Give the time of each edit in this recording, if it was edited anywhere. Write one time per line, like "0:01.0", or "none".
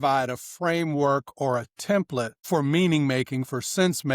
0:02.4